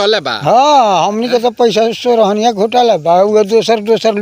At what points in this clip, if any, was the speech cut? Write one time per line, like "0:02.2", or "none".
none